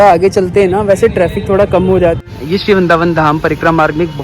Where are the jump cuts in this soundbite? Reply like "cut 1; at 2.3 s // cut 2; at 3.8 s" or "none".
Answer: cut 1; at 2.2 s